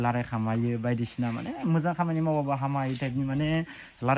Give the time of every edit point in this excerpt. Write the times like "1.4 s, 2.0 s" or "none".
none